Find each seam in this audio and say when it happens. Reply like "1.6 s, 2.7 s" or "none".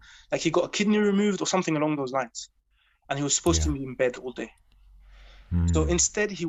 none